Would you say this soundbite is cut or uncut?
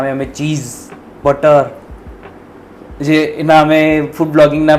uncut